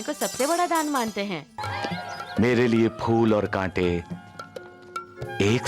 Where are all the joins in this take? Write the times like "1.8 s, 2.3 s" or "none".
1.6 s